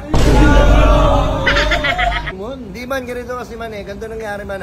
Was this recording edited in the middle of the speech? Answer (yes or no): yes